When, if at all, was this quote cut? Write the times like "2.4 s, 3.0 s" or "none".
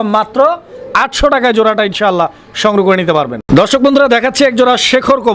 none